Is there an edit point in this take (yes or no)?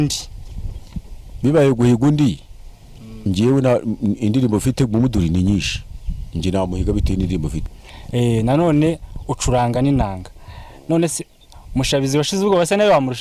yes